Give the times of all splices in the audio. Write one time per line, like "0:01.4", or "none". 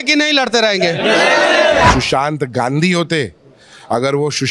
0:01.9